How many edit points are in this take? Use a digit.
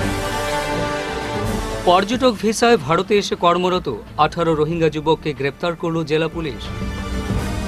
1